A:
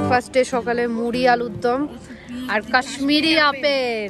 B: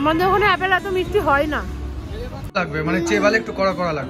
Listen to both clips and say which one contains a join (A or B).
B